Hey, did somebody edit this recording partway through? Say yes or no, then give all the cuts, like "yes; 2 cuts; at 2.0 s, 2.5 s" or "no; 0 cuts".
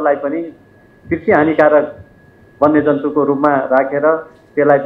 no; 0 cuts